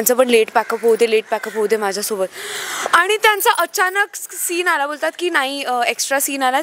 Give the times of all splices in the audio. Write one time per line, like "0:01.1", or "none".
none